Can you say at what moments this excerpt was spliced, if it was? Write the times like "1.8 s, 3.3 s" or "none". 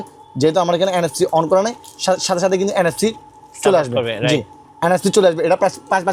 none